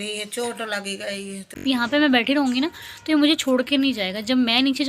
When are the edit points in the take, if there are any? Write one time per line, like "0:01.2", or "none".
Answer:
0:01.6

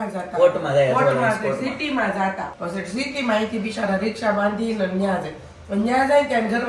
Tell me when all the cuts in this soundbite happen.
none

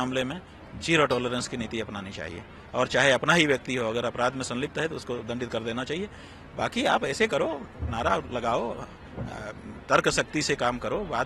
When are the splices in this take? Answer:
none

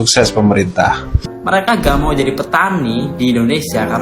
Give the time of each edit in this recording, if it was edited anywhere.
0:01.3

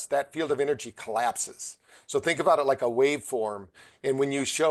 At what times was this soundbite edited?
none

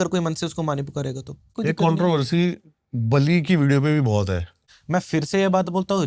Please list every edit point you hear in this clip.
0:01.5
0:04.7

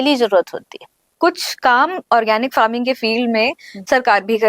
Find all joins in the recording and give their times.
0:01.1

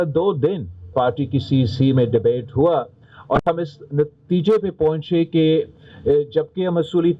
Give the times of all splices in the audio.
0:00.9

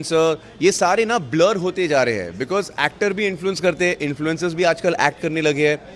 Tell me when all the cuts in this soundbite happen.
none

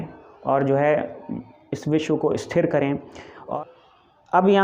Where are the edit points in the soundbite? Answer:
0:03.5

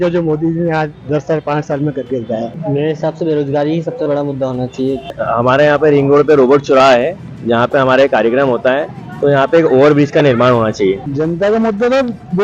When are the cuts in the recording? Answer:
0:02.6
0:05.2
0:11.1

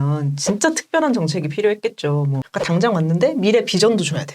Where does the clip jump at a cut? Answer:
0:02.4

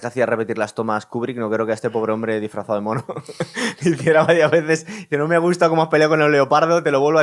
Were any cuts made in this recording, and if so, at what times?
none

